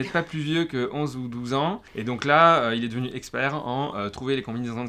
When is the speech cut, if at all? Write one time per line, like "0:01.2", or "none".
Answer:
none